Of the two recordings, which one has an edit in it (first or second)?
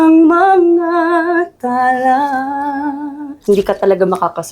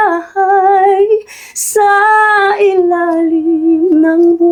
first